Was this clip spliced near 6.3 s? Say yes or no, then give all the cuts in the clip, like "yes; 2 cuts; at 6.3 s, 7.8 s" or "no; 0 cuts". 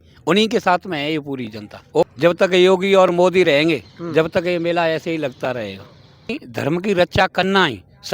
yes; 2 cuts; at 2.1 s, 6.3 s